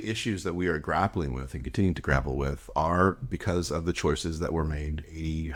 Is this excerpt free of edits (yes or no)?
yes